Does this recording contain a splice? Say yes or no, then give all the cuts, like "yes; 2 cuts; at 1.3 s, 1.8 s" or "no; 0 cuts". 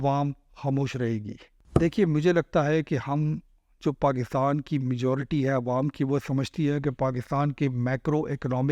yes; 1 cut; at 1.5 s